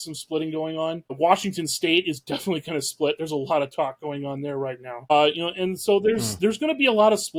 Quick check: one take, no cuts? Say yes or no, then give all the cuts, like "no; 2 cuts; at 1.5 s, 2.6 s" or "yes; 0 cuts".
yes; 0 cuts